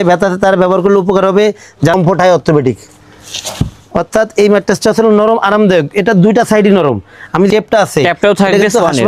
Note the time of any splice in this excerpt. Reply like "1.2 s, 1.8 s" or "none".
1.9 s, 7.5 s